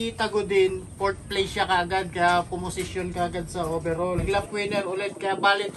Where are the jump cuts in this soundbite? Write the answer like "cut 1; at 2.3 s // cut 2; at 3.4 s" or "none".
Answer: cut 1; at 4.2 s